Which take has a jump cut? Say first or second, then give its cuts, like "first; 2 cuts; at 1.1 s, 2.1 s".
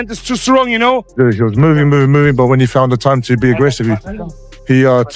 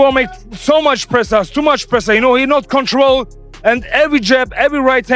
first; 1 cut; at 1.1 s